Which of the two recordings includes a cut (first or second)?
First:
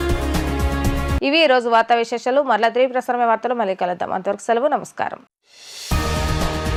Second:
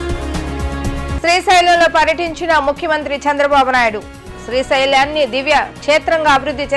second